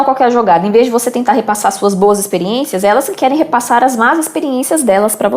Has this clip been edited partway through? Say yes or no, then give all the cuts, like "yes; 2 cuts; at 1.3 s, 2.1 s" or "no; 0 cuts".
no; 0 cuts